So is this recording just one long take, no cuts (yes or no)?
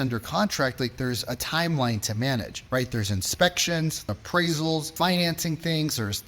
no